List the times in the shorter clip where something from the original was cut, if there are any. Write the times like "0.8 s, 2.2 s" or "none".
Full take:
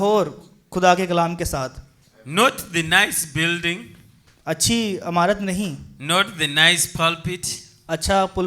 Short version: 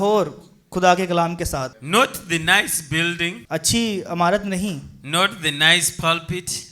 1.8 s, 3.4 s